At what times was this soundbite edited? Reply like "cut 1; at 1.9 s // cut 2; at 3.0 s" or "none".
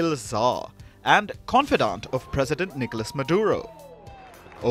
none